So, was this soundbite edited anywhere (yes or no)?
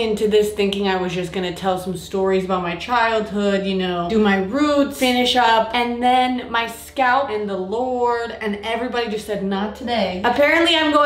no